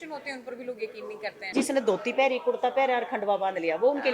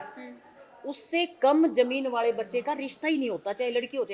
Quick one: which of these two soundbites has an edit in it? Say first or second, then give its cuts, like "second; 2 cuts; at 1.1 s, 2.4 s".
first; 1 cut; at 1.5 s